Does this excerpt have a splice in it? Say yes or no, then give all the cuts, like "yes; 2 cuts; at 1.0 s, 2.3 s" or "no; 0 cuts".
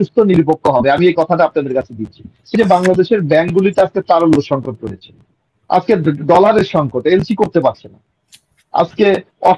yes; 1 cut; at 2.5 s